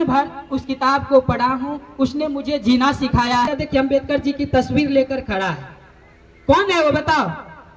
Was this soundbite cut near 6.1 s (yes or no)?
no